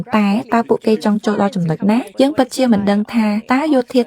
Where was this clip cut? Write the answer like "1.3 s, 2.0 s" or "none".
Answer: 2.1 s